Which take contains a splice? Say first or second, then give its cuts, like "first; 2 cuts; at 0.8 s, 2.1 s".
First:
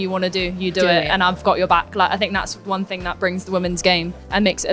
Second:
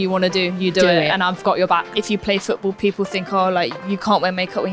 second; 1 cut; at 1.9 s